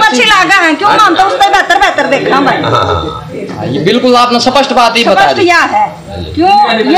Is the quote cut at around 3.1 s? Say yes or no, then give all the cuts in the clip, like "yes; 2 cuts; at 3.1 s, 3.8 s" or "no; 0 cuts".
no; 0 cuts